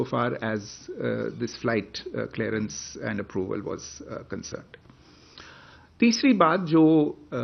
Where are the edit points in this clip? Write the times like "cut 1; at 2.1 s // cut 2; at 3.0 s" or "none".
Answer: none